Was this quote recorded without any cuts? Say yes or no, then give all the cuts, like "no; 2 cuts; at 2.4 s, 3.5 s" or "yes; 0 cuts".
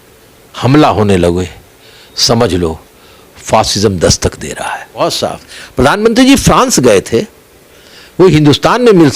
no; 1 cut; at 5.0 s